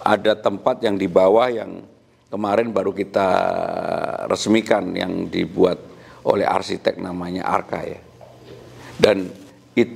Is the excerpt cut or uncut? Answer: uncut